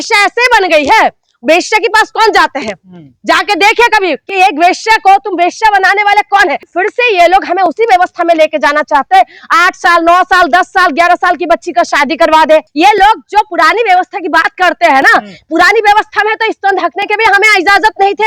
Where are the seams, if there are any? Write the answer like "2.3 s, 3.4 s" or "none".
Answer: 6.7 s, 12.7 s